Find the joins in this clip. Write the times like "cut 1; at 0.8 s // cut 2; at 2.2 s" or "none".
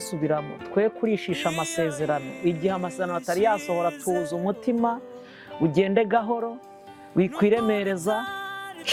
none